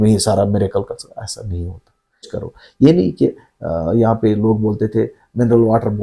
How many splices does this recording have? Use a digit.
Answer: 1